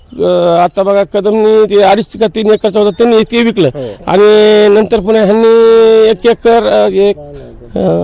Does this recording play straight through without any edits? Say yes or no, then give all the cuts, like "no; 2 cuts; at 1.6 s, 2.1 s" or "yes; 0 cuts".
yes; 0 cuts